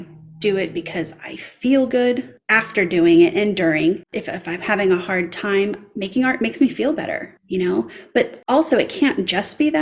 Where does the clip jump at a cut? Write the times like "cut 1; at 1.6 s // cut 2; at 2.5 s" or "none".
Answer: cut 1; at 4.2 s // cut 2; at 7.3 s // cut 3; at 8.4 s

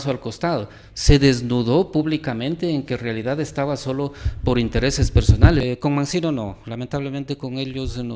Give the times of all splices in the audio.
cut 1; at 5.6 s

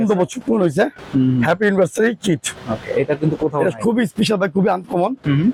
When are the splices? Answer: none

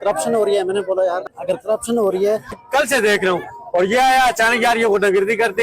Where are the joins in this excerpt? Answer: cut 1; at 1.3 s // cut 2; at 2.6 s

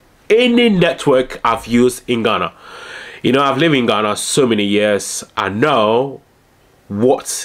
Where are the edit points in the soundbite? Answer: none

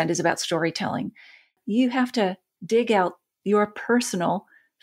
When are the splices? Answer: cut 1; at 1.5 s // cut 2; at 2.5 s

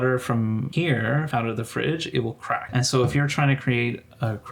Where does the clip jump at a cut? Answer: cut 1; at 0.9 s // cut 2; at 2.7 s

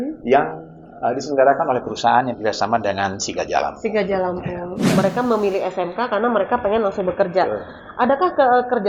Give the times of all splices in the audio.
cut 1; at 4.8 s

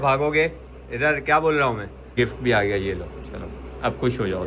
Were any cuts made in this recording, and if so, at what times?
cut 1; at 2.2 s

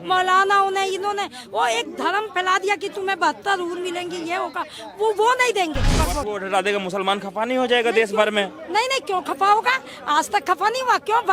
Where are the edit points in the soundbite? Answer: cut 1; at 5.9 s

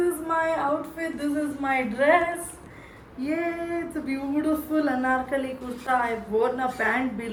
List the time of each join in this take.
none

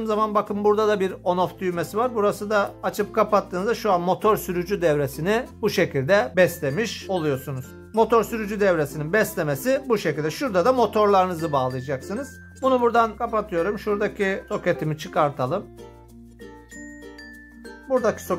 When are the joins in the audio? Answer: none

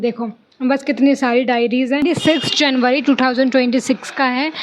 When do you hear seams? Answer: cut 1; at 2.0 s

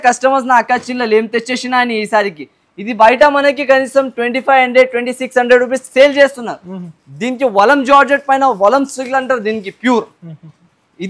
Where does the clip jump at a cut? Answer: none

